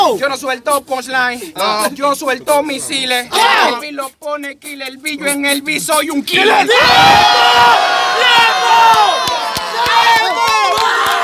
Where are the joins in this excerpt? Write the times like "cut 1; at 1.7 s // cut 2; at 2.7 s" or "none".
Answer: none